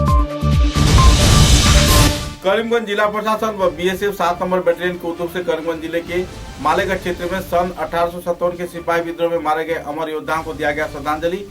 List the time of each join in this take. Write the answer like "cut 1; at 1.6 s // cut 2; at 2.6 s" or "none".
cut 1; at 2.2 s

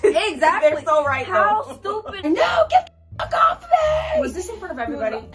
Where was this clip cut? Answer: cut 1; at 2.2 s

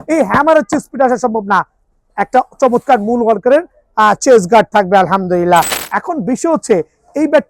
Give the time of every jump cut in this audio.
cut 1; at 5.8 s

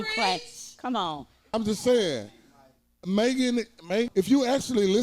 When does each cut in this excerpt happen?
cut 1; at 1.5 s // cut 2; at 4.1 s

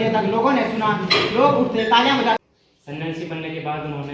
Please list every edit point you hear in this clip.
cut 1; at 2.4 s

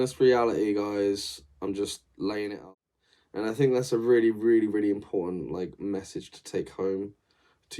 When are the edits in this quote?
cut 1; at 2.6 s

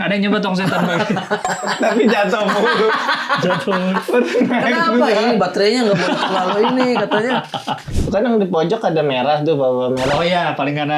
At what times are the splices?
cut 1; at 7.9 s

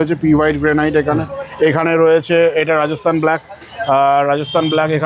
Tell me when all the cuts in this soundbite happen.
none

